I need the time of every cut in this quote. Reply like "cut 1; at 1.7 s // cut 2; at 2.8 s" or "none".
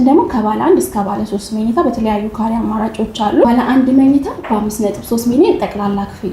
cut 1; at 3.4 s